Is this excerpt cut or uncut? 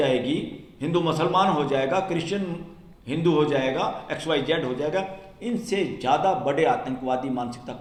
uncut